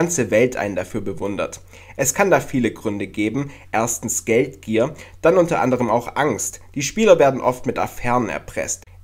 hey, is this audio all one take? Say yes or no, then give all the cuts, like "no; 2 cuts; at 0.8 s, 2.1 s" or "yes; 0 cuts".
no; 1 cut; at 1.3 s